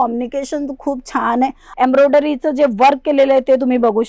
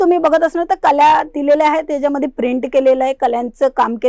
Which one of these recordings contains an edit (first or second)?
first